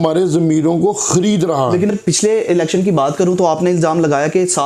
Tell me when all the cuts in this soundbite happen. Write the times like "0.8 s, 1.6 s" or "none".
none